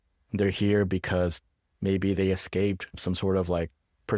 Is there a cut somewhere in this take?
no; 0 cuts

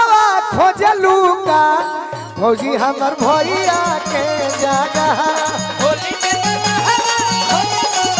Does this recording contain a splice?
no; 0 cuts

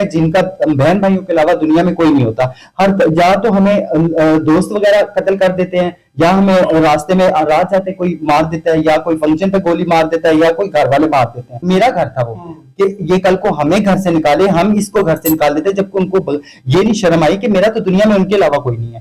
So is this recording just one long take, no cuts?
no; 1 cut; at 11.6 s

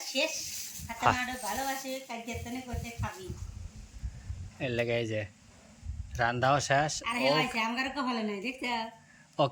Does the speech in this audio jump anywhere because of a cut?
no; 0 cuts

